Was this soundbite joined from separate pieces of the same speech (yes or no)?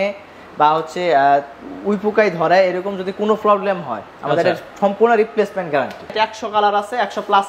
yes